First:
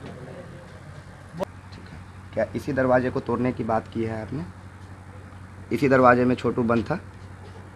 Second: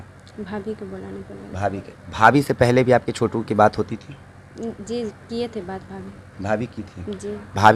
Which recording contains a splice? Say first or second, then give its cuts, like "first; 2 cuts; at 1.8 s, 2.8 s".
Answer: first; 1 cut; at 1.4 s